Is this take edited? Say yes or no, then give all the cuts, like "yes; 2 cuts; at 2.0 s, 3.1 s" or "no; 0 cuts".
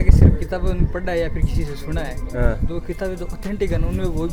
no; 0 cuts